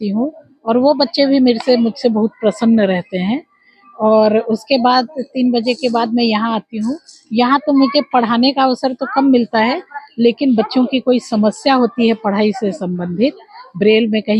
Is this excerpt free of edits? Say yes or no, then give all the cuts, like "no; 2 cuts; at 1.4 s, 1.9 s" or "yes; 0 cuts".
yes; 0 cuts